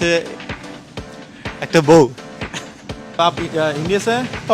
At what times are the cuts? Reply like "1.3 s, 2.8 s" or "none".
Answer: 3.2 s